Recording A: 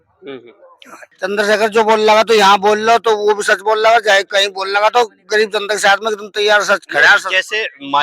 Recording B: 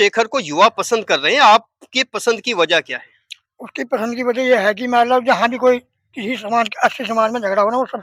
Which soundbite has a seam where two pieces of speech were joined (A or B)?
A